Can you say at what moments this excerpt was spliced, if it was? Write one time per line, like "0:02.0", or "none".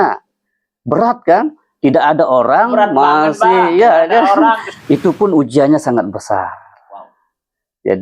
0:04.7